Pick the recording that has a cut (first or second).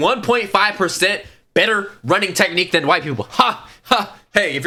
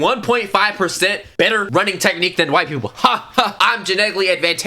second